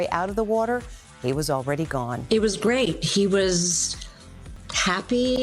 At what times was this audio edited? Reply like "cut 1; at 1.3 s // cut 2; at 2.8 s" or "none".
none